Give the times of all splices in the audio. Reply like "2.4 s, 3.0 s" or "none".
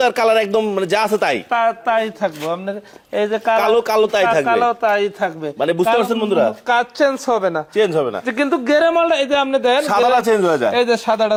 none